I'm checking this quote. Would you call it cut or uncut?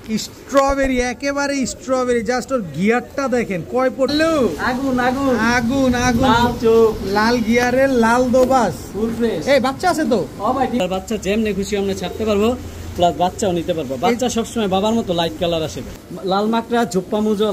cut